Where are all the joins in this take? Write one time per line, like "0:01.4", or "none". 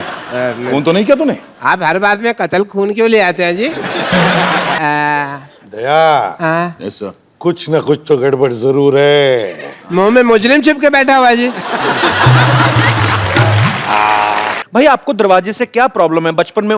0:04.8
0:14.6